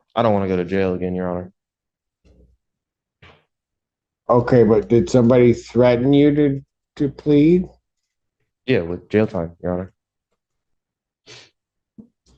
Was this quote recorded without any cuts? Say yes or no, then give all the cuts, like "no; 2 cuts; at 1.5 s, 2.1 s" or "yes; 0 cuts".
yes; 0 cuts